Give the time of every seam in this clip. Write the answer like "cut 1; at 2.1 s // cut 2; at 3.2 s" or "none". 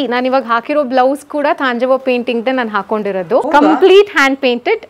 cut 1; at 3.5 s